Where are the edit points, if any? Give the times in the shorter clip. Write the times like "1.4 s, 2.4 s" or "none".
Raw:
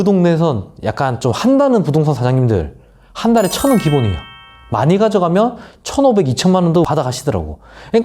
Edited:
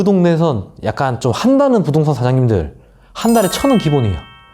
none